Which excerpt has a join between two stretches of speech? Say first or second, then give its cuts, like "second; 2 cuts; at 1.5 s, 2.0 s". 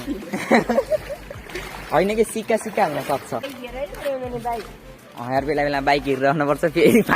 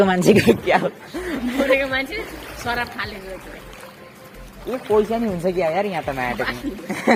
first; 1 cut; at 3.5 s